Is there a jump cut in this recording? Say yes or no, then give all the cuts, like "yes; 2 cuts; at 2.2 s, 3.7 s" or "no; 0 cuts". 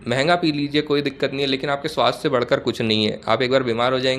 no; 0 cuts